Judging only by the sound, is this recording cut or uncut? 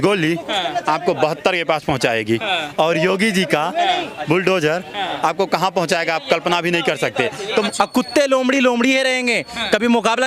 cut